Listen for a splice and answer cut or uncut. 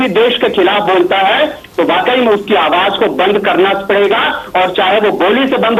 uncut